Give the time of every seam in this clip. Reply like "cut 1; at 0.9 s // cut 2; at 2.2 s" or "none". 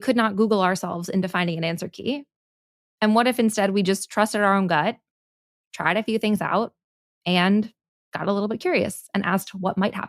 none